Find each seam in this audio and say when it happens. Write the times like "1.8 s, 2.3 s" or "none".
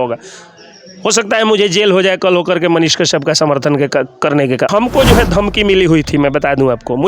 4.7 s